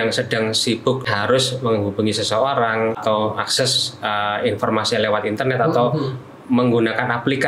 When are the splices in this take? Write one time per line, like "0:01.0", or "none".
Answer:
0:01.1
0:03.0